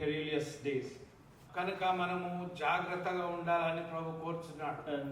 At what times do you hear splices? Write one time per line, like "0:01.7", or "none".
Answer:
0:01.4